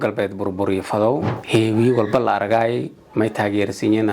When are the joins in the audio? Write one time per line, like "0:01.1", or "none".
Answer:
0:01.4